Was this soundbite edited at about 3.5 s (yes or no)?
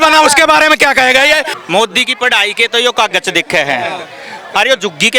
no